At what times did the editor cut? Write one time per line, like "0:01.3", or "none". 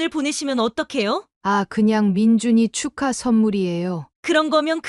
0:01.3

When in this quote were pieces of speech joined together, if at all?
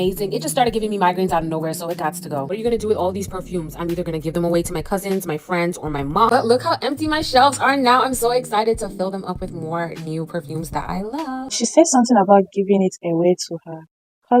0:02.5
0:06.3
0:11.5

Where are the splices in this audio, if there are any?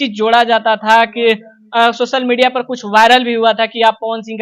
none

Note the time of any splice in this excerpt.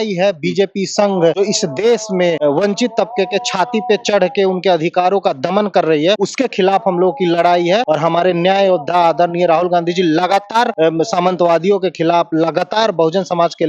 0:01.4
0:02.4
0:06.3
0:07.8
0:10.7

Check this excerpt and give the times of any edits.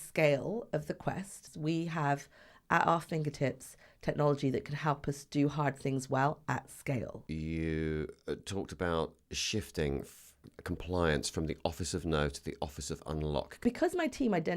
0:01.4
0:07.2
0:13.6

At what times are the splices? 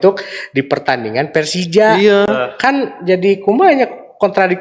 none

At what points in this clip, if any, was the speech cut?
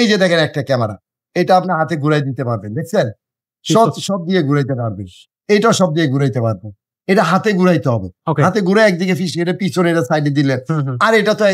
none

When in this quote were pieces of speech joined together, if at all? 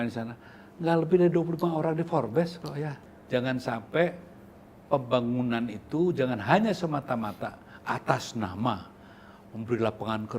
0:03.0

